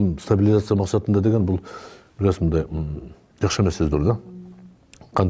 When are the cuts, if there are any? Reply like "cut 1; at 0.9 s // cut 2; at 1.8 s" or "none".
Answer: none